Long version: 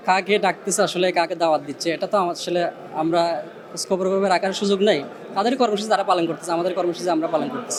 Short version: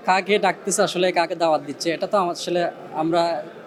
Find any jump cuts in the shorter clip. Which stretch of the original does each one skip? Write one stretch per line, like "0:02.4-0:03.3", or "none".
none